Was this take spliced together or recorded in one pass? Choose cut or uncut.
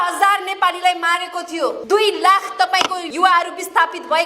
cut